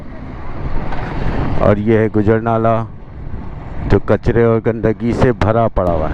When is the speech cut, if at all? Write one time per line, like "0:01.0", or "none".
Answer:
none